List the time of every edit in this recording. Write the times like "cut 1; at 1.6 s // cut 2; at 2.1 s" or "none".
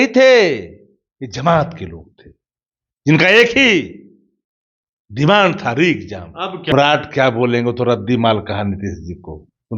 cut 1; at 6.7 s